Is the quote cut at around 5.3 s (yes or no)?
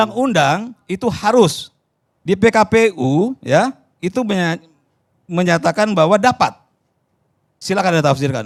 no